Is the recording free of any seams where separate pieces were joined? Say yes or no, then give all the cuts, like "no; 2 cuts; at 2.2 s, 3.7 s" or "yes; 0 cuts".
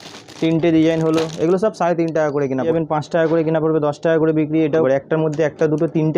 no; 2 cuts; at 2.7 s, 4.8 s